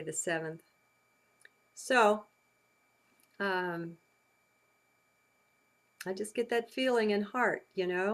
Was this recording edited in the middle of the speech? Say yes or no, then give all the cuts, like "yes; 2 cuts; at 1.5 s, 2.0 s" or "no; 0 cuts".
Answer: yes; 1 cut; at 6.3 s